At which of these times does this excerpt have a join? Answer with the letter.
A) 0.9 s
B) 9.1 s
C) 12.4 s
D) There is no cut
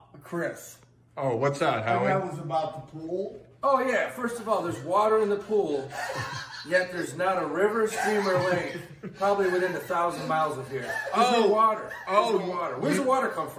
D